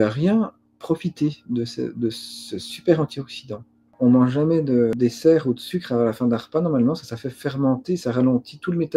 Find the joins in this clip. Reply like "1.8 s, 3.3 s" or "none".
3.9 s, 4.9 s